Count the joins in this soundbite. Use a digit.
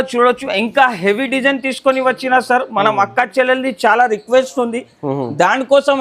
0